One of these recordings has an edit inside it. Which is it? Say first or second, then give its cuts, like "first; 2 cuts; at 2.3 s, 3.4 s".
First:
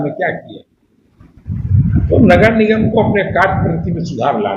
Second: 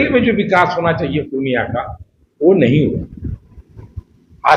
first; 1 cut; at 1.6 s